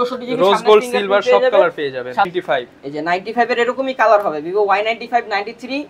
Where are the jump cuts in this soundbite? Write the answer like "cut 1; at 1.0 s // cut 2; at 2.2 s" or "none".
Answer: cut 1; at 2.3 s